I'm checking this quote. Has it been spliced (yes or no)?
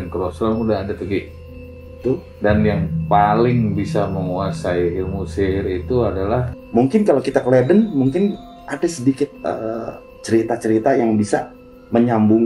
yes